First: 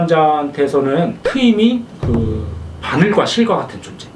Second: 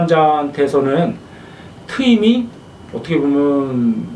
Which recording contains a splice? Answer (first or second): first